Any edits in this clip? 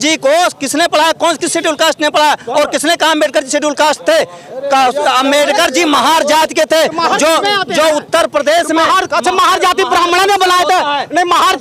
no; 0 cuts

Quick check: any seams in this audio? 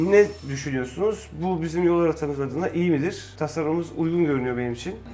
no; 0 cuts

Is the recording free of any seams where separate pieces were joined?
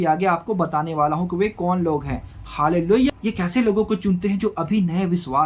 no; 1 cut; at 3.1 s

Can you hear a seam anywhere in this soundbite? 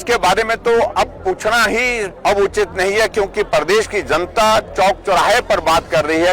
yes; 1 cut; at 2.1 s

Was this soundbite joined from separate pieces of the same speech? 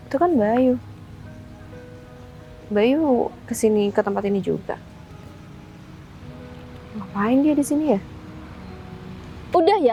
no; 0 cuts

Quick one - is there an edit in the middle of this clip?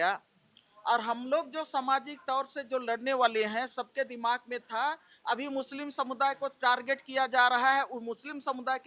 no; 0 cuts

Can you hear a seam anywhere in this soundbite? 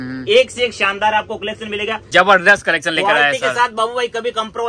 yes; 1 cut; at 2.1 s

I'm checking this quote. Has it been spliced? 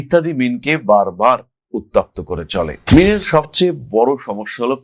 yes; 1 cut; at 2.8 s

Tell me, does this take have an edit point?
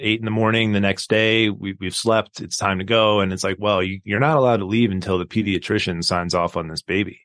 no; 0 cuts

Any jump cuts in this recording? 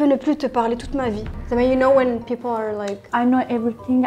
yes; 1 cut; at 1.3 s

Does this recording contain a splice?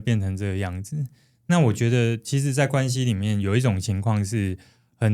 no; 0 cuts

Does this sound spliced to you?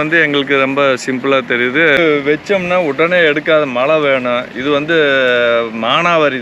yes; 1 cut; at 2.0 s

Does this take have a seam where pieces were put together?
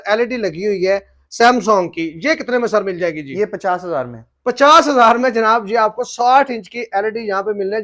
no; 0 cuts

